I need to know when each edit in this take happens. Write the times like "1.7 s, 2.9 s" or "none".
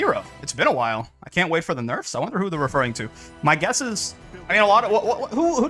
none